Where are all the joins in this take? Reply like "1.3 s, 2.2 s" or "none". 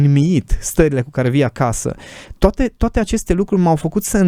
none

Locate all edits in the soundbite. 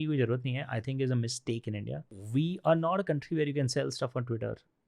2.2 s

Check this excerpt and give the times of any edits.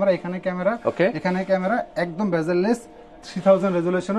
none

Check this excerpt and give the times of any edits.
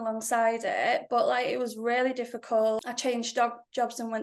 2.8 s

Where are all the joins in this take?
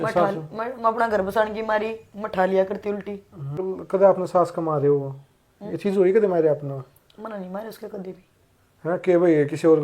3.6 s

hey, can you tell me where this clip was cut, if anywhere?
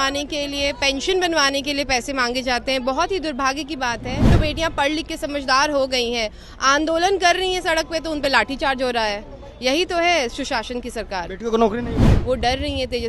4.3 s, 12.1 s

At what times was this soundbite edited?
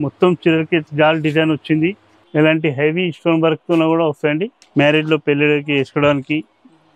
0.9 s, 2.1 s, 4.6 s

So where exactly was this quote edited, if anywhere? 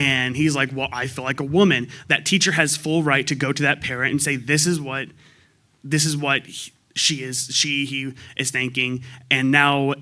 none

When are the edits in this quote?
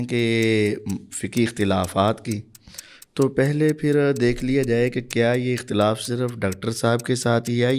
none

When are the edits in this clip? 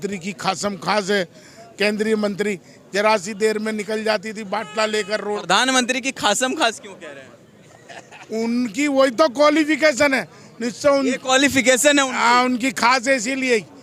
none

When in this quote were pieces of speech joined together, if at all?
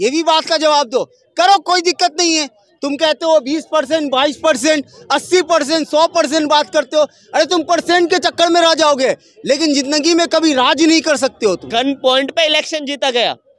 11.7 s

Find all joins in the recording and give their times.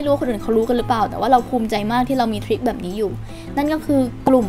none

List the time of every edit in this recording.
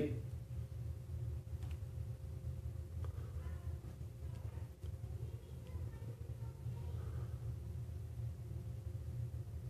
none

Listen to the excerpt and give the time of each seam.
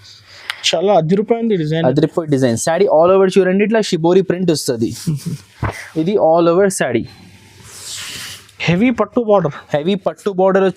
5.8 s

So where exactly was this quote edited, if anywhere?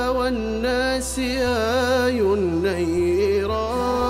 none

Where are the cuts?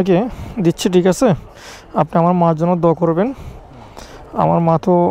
none

